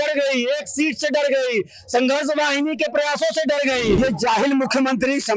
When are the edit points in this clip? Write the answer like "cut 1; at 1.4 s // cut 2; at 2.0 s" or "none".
cut 1; at 4.0 s